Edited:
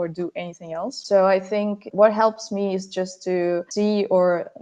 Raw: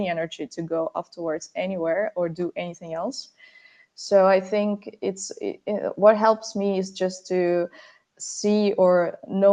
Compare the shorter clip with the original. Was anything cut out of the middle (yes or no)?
yes